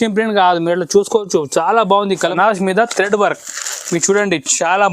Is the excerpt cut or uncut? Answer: cut